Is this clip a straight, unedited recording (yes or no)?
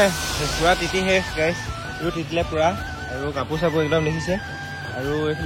yes